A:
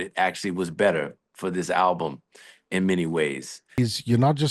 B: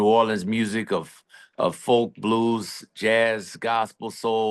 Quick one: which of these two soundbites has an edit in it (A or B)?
A